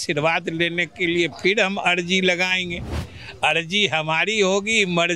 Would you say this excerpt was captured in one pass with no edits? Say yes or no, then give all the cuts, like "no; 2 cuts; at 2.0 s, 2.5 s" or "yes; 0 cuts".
yes; 0 cuts